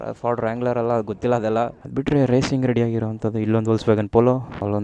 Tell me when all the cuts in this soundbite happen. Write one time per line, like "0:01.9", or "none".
0:01.8